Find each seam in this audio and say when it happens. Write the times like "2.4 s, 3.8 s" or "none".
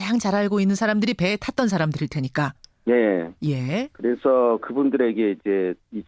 1.0 s